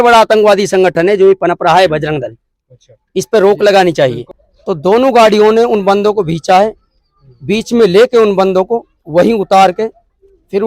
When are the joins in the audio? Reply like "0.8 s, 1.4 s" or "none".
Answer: 4.3 s